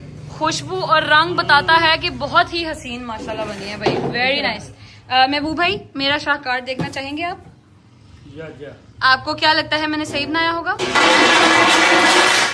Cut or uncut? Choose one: uncut